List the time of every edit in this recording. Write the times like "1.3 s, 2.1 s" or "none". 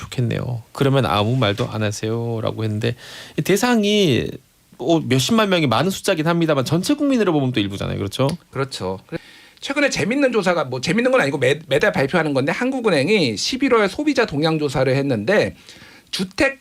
9.2 s